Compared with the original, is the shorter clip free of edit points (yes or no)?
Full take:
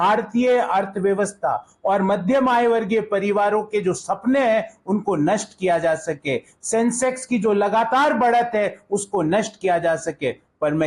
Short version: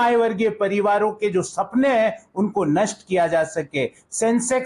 yes